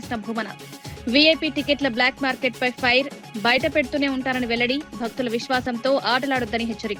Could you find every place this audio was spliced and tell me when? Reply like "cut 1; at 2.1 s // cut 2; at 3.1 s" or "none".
none

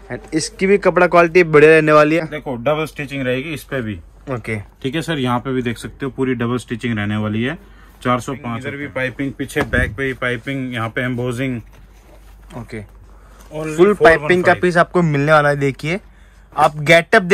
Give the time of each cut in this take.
cut 1; at 2.2 s // cut 2; at 8.4 s

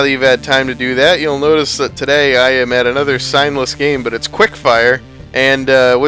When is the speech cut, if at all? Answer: none

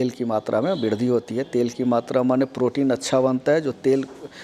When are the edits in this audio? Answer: none

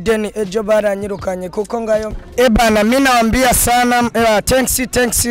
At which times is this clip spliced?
cut 1; at 2.1 s

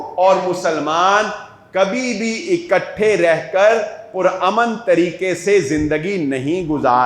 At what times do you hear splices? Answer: none

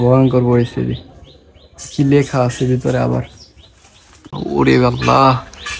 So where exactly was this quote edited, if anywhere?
cut 1; at 4.4 s

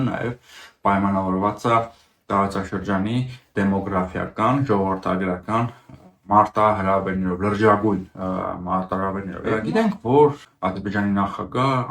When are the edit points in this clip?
cut 1; at 9.3 s // cut 2; at 10.5 s

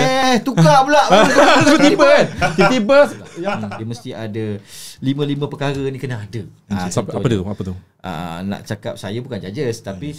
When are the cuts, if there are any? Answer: cut 1; at 3.3 s

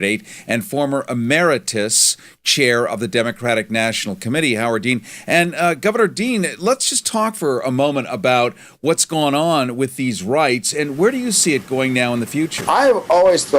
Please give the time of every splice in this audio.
cut 1; at 4.9 s

